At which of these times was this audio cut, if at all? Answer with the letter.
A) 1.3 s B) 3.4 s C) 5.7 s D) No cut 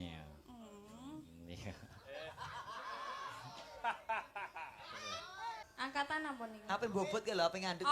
C